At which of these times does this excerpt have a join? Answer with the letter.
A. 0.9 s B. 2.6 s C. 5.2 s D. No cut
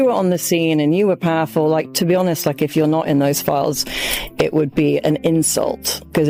D